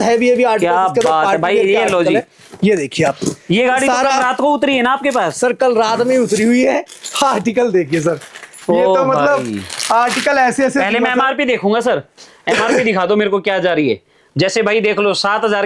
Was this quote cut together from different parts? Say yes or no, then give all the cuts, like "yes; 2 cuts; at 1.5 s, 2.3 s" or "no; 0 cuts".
no; 0 cuts